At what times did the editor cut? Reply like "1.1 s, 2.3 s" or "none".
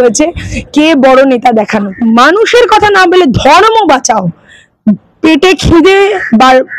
1.9 s